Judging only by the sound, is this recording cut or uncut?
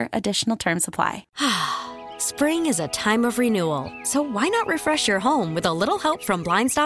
cut